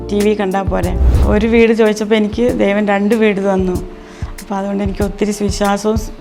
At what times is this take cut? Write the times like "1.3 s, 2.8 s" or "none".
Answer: 1.1 s